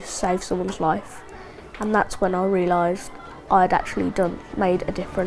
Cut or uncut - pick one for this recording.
uncut